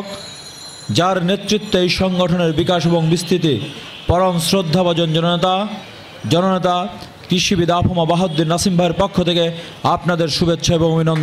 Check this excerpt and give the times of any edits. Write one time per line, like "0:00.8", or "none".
none